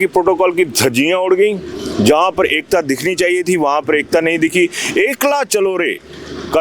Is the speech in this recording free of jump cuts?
yes; 0 cuts

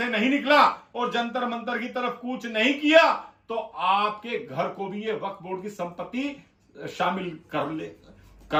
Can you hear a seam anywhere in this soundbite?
no; 0 cuts

